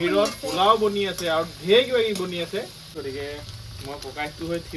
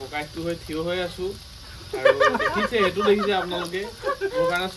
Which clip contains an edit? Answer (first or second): first